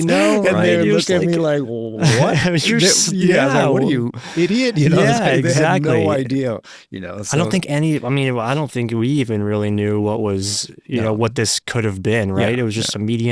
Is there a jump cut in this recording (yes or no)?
no